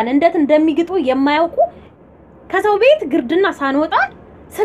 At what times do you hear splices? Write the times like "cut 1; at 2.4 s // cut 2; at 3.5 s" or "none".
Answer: cut 1; at 1.9 s